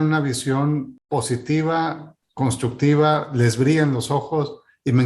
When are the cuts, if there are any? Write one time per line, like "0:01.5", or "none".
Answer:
0:01.0